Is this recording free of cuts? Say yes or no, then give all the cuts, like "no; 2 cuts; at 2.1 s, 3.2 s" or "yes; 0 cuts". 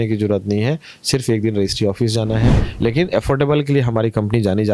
no; 1 cut; at 2.6 s